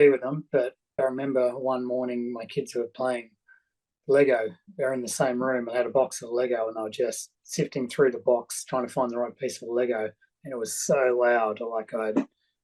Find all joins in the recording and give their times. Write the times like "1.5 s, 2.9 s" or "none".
none